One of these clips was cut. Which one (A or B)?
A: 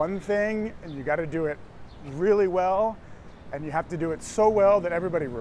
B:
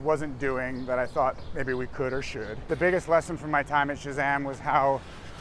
B